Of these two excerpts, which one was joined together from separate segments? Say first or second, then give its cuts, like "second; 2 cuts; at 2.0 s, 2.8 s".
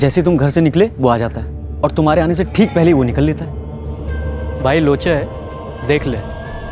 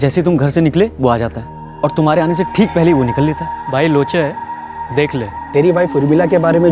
second; 2 cuts; at 3.5 s, 5.4 s